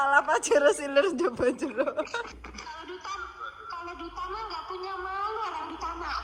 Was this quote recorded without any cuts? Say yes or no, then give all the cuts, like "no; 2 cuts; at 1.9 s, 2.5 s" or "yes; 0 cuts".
no; 1 cut; at 2.4 s